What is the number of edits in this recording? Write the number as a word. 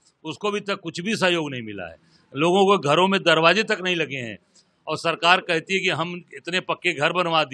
zero